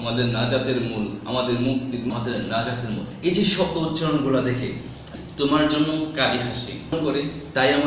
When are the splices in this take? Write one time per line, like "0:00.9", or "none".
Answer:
0:02.1
0:05.1
0:06.9